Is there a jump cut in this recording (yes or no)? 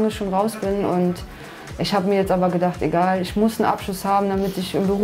no